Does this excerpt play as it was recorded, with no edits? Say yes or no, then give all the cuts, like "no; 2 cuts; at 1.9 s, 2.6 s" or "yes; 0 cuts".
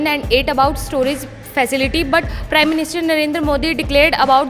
no; 1 cut; at 2.3 s